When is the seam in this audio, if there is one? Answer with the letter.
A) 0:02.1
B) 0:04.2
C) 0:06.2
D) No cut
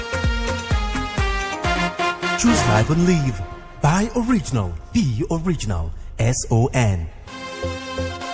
A